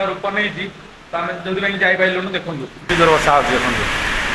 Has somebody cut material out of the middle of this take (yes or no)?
yes